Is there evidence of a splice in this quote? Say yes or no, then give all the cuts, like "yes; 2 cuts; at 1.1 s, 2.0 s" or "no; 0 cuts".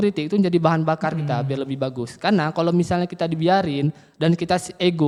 no; 0 cuts